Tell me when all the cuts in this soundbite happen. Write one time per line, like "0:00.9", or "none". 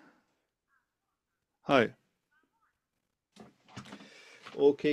0:03.2